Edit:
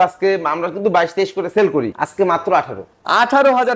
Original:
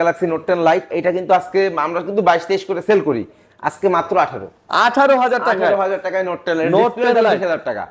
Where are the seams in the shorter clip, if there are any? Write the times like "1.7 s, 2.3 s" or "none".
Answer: 2.0 s